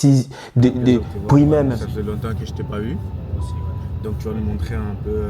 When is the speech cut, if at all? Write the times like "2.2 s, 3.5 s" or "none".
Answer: 1.9 s